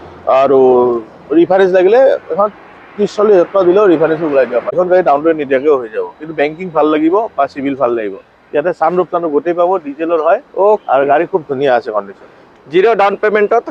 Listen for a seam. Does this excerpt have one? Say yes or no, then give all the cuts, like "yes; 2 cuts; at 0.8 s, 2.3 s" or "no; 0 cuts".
yes; 1 cut; at 4.7 s